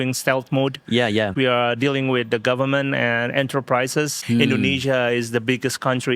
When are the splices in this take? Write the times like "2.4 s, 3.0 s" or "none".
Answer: 1.3 s, 4.2 s